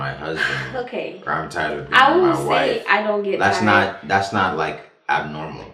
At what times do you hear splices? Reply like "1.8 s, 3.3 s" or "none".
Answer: none